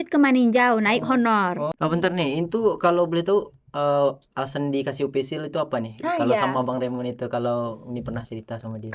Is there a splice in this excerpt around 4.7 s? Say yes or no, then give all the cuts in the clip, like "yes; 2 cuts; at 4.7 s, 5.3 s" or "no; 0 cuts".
no; 1 cut; at 1.7 s